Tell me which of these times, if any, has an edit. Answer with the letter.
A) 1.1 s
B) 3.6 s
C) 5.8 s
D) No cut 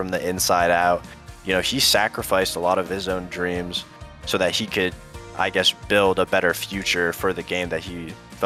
D